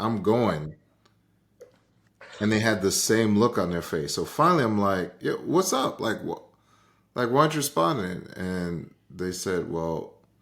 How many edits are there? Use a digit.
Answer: 0